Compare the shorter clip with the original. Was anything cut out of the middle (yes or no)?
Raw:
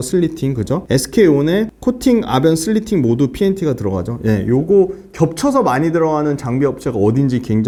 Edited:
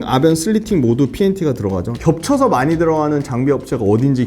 yes